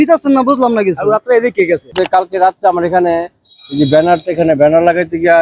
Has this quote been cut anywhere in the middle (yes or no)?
yes